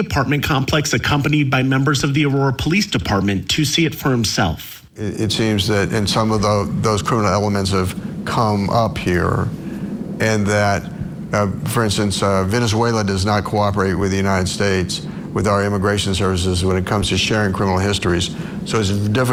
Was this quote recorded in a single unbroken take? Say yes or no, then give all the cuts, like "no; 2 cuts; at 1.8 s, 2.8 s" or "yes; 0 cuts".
yes; 0 cuts